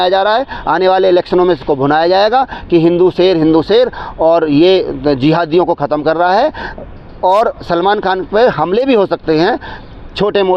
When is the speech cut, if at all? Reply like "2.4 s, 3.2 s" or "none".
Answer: none